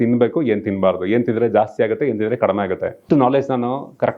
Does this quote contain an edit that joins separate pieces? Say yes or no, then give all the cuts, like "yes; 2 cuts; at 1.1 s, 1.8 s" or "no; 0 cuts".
yes; 1 cut; at 3.0 s